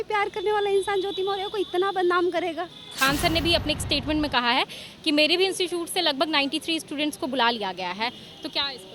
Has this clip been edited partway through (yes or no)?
yes